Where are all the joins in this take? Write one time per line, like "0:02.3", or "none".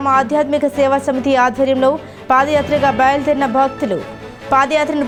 none